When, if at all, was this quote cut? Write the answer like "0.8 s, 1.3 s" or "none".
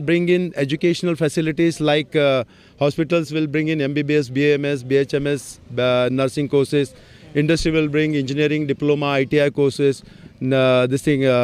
none